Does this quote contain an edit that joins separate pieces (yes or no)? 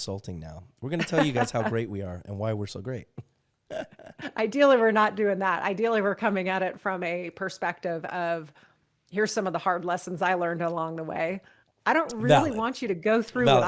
yes